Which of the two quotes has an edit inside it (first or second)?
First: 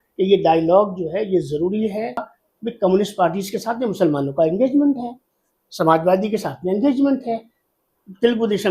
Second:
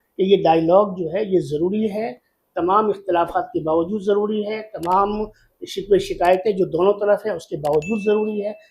first